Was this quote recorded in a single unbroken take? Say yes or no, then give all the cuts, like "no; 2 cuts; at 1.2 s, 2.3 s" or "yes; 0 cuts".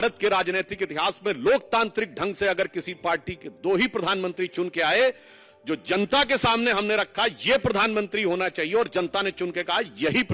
yes; 0 cuts